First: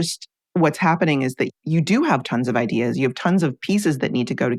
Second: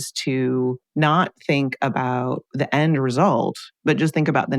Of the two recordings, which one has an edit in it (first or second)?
second